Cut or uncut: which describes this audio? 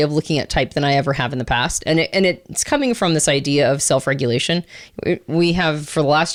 uncut